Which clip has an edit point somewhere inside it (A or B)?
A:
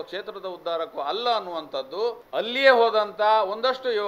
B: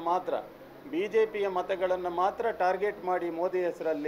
A